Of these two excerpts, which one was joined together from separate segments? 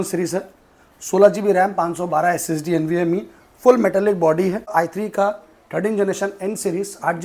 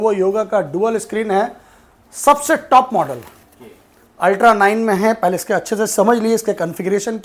first; 1 cut; at 4.7 s

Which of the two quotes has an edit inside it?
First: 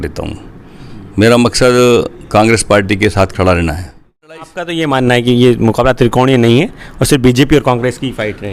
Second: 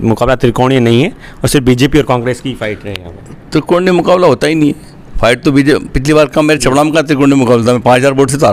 first; 1 cut; at 4.6 s

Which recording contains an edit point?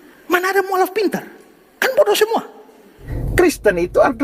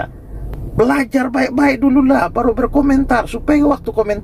first; 1 cut; at 2.9 s

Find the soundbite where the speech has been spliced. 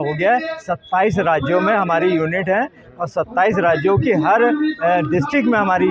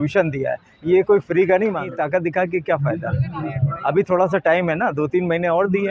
second; 1 cut; at 1.9 s

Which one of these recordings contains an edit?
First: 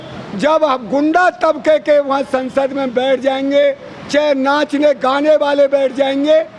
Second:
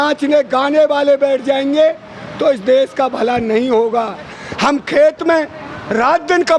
second; 1 cut; at 4.4 s

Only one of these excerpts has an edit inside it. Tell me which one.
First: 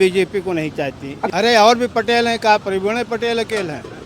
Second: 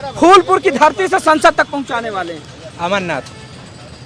first; 1 cut; at 1.2 s

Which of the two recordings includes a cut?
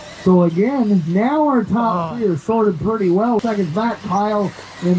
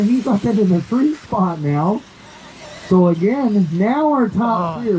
first; 1 cut; at 3.4 s

